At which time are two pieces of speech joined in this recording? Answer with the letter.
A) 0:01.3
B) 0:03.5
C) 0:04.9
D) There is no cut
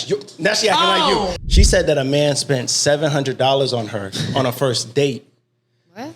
A